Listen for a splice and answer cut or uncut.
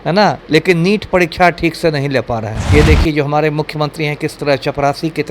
cut